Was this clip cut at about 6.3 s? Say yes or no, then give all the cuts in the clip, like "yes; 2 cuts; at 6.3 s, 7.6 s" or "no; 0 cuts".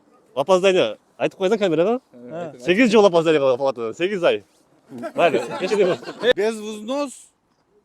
yes; 1 cut; at 6.3 s